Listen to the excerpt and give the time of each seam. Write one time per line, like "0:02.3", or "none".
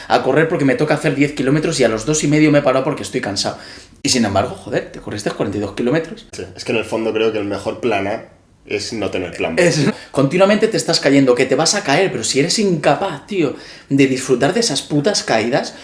0:06.4
0:09.9